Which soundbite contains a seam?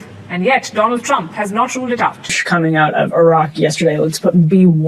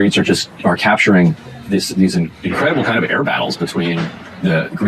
first; 1 cut; at 2.4 s

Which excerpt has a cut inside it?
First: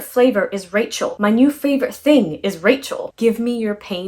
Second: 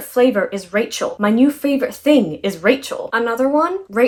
first; 1 cut; at 3.1 s

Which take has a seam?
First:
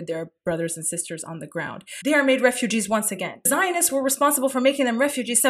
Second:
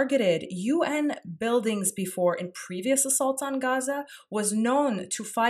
first; 2 cuts; at 1.8 s, 3.5 s

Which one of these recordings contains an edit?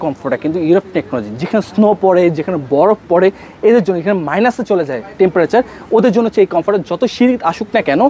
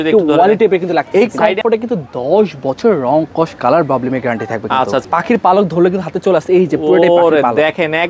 second; 2 cuts; at 1.1 s, 5.1 s

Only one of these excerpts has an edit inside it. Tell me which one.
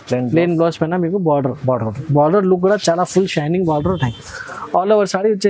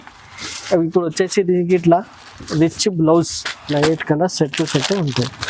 second; 1 cut; at 3.6 s

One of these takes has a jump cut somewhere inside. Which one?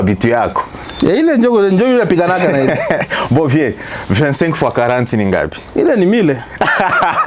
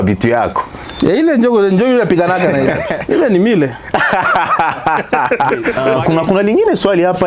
second; 2 cuts; at 2.9 s, 5.7 s

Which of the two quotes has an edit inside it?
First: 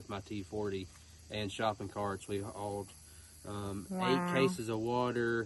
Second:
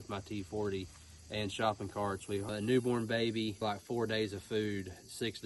second; 2 cuts; at 2.5 s, 3.6 s

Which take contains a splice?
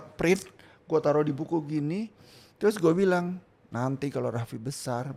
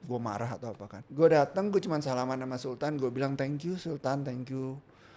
second; 1 cut; at 1.0 s

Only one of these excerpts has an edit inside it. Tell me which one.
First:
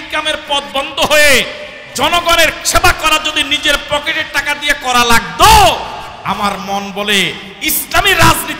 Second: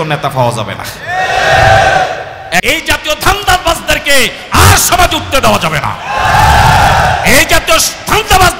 second; 1 cut; at 2.6 s

